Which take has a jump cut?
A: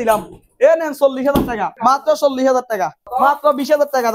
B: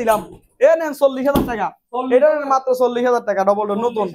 A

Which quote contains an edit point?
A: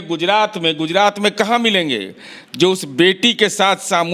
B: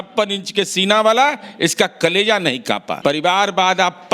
B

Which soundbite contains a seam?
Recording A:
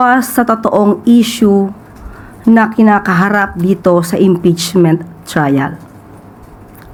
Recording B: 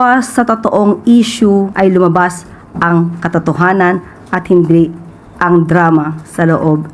B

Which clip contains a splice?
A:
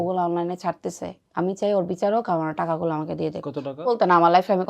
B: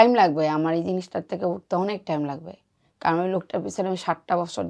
A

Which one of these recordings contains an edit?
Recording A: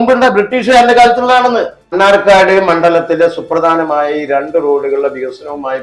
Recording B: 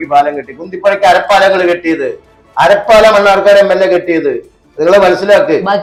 A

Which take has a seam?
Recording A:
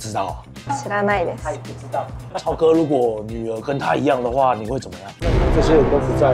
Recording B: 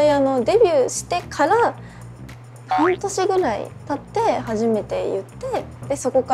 A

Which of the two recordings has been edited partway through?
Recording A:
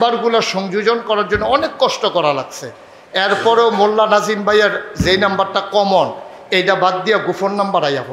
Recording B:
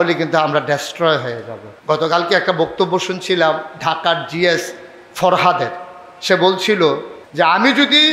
B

